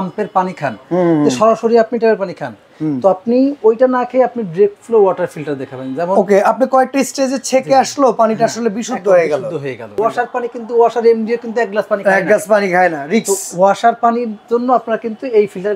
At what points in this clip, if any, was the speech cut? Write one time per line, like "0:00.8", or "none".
0:10.0